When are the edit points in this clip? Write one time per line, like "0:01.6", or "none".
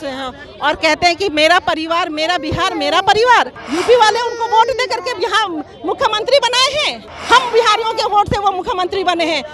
0:03.6
0:07.1